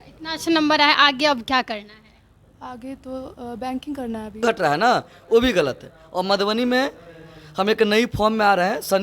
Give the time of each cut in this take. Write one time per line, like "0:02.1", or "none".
0:04.4
0:06.6